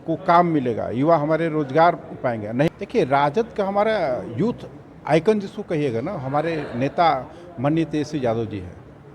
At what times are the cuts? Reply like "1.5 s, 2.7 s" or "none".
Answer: 2.7 s